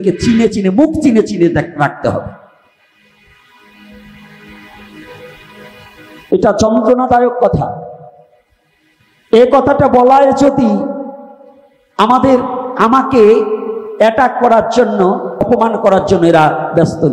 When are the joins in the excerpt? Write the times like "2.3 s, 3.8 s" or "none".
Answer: 15.5 s